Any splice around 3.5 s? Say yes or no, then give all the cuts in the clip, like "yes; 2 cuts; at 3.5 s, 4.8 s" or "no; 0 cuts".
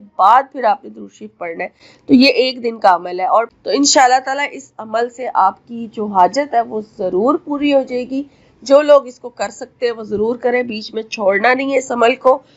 yes; 1 cut; at 3.5 s